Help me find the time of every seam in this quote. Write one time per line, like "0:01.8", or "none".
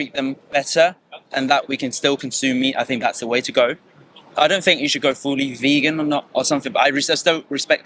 none